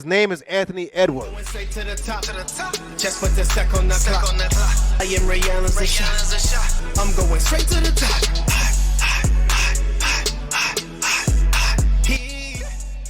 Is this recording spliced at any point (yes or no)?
yes